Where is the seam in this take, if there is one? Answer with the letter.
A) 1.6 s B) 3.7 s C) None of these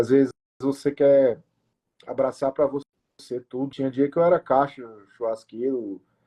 B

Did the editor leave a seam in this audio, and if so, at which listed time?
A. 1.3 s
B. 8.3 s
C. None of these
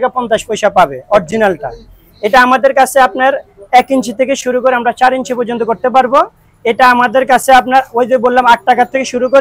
C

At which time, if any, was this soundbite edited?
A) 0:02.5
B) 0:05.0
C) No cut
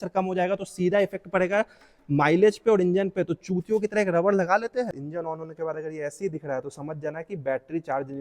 B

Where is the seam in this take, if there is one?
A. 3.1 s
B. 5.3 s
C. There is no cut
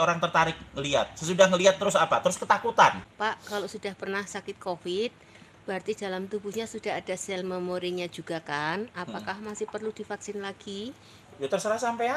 A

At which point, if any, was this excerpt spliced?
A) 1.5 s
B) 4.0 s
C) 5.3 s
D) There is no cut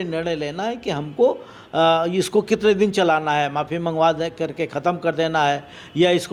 D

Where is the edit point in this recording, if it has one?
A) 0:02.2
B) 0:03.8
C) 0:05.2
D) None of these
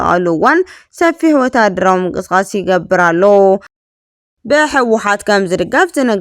B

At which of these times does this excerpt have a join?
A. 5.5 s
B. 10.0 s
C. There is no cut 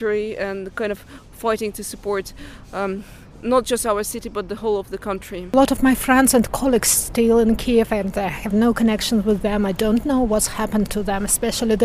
A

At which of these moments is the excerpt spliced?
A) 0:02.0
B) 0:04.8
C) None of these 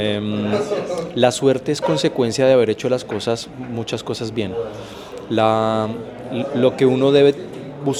C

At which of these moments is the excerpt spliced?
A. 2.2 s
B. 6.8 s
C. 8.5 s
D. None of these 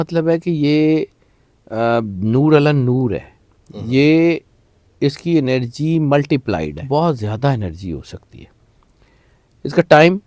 B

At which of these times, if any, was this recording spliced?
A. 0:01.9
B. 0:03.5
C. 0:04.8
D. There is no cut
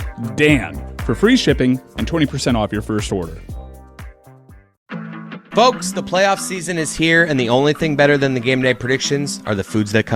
C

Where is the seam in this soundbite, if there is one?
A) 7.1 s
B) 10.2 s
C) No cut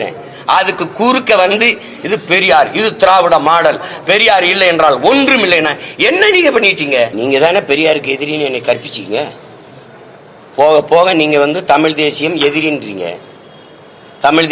A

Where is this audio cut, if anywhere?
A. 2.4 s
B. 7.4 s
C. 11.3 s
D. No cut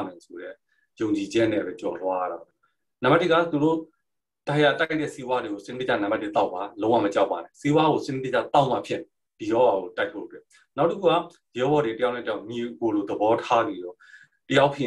A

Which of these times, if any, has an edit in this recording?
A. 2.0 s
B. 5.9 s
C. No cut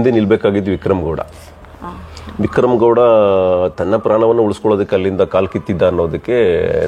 C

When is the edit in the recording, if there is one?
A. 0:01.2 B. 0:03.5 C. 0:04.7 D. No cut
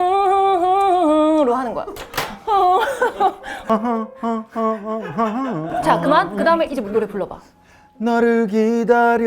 B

